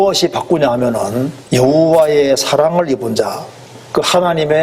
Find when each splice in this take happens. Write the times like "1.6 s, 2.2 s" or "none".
1.4 s